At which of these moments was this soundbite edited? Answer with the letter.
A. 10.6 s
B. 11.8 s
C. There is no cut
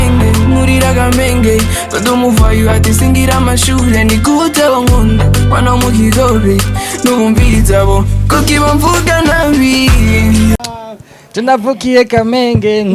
A